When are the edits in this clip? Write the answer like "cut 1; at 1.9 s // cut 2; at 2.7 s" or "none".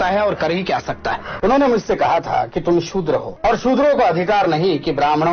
cut 1; at 1.3 s // cut 2; at 3.3 s